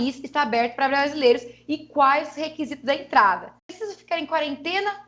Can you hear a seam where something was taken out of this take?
yes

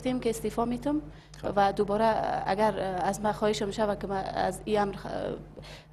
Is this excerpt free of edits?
no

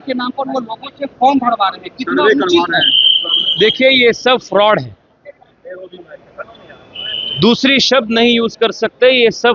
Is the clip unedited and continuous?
yes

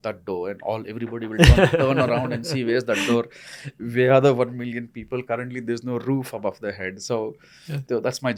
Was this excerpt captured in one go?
yes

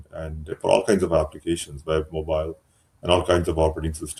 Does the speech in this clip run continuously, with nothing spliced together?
yes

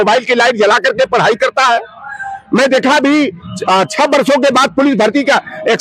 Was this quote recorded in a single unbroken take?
yes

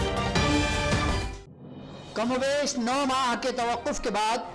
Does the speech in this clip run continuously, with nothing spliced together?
no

